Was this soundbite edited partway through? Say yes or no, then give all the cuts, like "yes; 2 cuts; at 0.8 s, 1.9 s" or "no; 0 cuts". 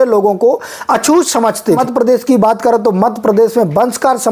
yes; 1 cut; at 1.8 s